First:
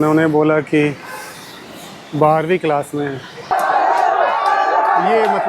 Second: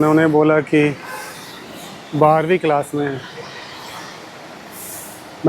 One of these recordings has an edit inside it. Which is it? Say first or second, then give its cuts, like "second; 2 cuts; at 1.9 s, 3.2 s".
first; 1 cut; at 3.5 s